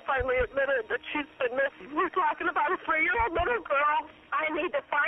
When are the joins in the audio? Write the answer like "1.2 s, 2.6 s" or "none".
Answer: 1.8 s, 4.1 s